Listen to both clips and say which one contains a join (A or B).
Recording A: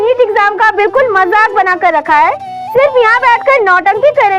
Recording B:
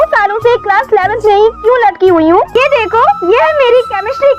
B